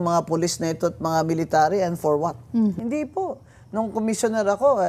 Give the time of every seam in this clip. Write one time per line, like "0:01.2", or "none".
0:02.8